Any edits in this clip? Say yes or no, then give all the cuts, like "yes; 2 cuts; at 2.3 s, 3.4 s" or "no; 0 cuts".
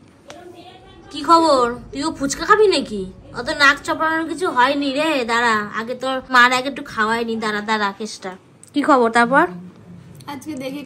no; 0 cuts